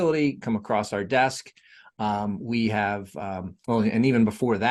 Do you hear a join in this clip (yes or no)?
no